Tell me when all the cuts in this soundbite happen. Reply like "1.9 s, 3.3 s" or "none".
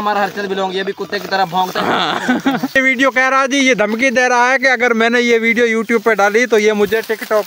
2.8 s